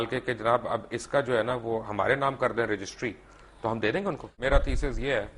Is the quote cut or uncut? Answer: cut